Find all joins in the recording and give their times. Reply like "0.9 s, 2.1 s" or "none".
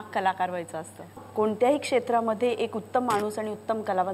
1.1 s